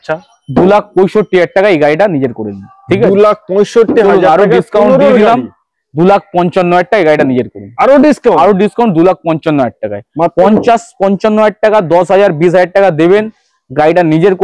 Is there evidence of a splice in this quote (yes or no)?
no